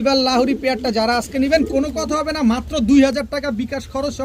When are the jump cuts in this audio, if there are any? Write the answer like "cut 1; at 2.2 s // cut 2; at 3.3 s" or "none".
none